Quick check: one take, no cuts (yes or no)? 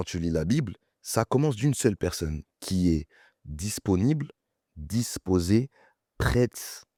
yes